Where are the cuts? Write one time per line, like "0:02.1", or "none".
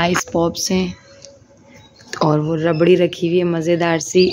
none